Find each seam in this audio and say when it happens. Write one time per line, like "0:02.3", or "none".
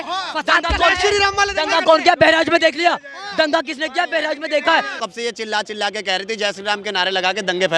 0:05.0